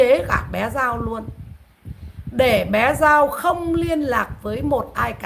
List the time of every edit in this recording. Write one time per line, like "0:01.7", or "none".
none